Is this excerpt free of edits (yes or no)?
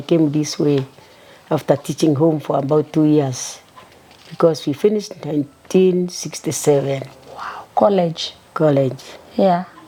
yes